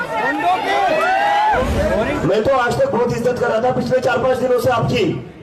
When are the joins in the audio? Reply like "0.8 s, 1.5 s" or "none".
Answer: 1.6 s